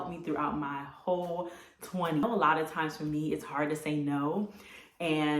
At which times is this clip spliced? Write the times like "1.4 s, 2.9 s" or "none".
2.2 s